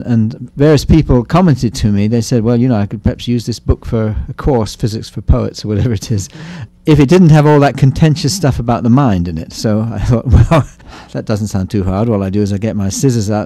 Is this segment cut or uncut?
uncut